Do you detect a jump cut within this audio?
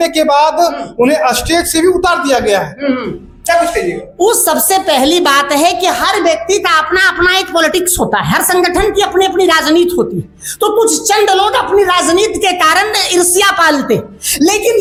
no; 0 cuts

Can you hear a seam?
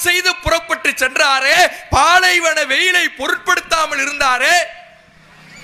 no; 0 cuts

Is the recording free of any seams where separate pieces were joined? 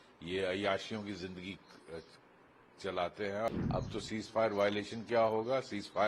no; 1 cut; at 3.5 s

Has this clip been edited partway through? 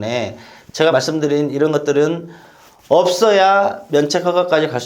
yes; 1 cut; at 0.9 s

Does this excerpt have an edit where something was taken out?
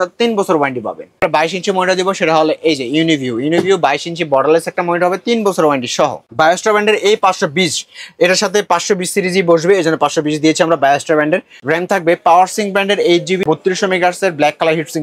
yes; 4 cuts; at 1.2 s, 6.2 s, 11.5 s, 13.4 s

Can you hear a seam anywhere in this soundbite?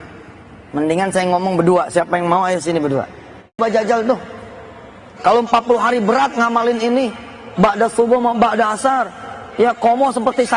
yes; 1 cut; at 3.6 s

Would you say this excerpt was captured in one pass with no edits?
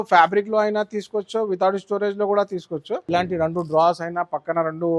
no; 1 cut; at 3.0 s

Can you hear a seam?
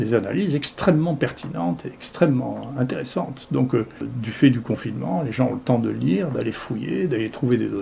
yes; 1 cut; at 4.1 s

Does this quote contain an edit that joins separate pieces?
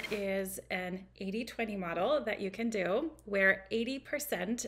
no; 0 cuts

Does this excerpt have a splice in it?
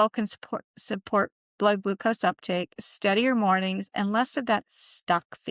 no; 0 cuts

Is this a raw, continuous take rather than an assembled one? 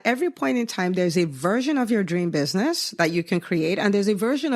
yes; 0 cuts

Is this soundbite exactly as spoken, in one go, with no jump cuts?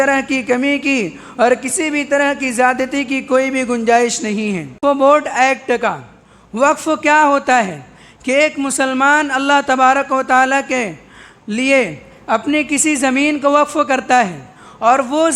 no; 1 cut; at 4.7 s

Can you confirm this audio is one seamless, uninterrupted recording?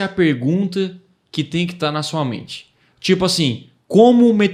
yes; 0 cuts

